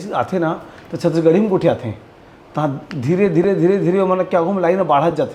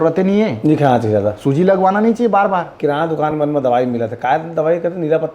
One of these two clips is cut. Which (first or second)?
second